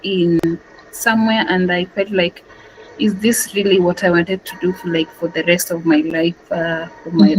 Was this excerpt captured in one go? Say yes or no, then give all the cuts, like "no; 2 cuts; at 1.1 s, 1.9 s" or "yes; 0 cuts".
yes; 0 cuts